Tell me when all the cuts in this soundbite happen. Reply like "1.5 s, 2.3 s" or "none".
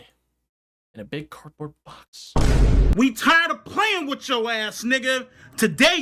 2.1 s